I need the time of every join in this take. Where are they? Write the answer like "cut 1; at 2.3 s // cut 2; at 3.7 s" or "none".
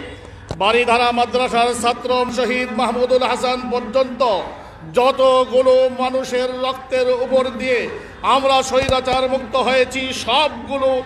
cut 1; at 2.3 s